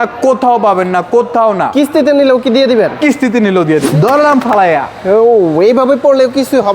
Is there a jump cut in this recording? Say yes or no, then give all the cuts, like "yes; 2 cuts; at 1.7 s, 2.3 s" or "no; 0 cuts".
yes; 1 cut; at 3.9 s